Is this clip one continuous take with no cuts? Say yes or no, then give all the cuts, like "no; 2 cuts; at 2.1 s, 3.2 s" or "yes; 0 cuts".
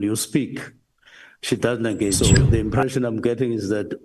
no; 1 cut; at 2.2 s